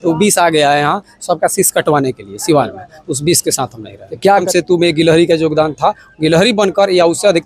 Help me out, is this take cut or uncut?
cut